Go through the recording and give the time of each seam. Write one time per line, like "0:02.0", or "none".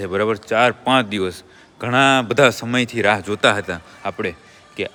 none